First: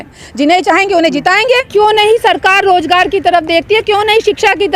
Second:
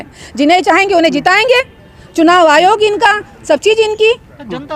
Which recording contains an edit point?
first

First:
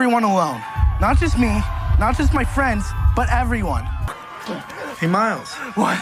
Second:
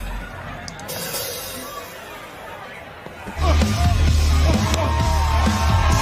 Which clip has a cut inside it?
second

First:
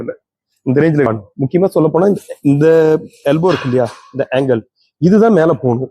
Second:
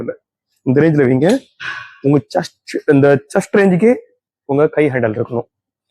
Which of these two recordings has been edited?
first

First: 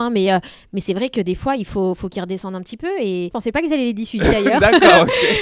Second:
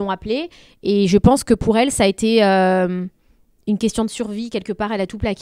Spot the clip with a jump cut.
first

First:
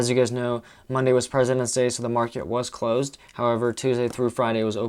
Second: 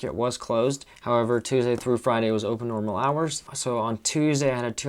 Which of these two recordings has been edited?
second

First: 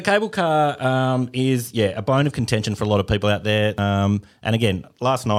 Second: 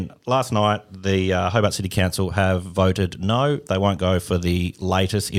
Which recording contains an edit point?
first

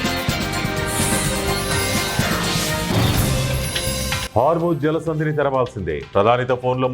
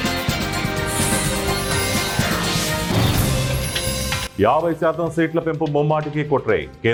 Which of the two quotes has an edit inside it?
first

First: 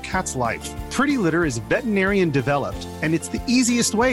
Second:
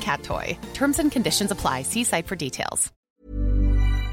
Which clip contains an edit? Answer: second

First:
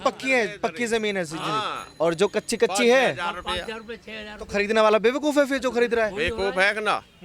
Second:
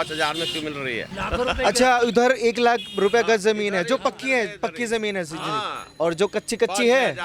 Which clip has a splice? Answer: second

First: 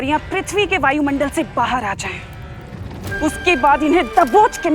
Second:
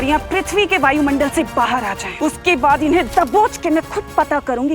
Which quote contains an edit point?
second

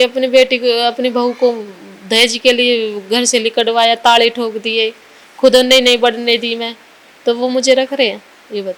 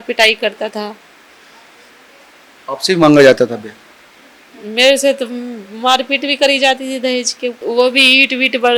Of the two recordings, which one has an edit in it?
second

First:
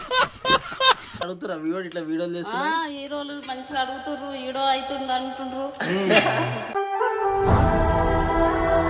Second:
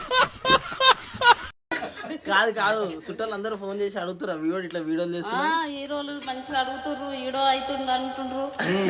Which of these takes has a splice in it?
first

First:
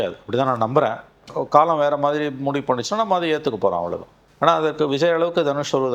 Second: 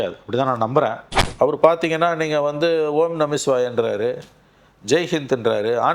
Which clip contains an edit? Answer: second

